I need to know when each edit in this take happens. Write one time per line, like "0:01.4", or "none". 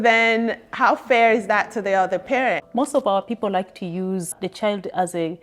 0:02.6
0:04.3